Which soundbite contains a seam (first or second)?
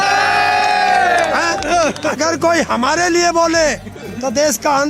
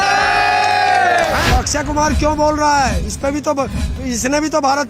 second